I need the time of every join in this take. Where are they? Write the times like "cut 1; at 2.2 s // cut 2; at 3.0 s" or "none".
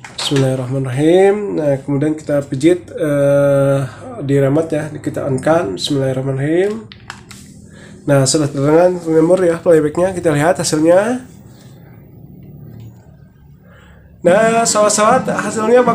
cut 1; at 12.9 s